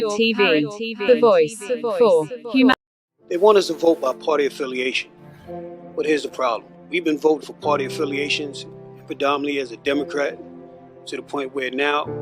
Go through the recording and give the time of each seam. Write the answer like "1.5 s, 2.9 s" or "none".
2.8 s